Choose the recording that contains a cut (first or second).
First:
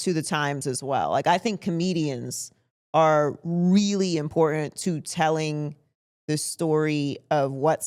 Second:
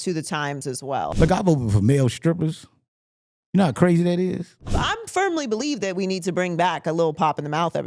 second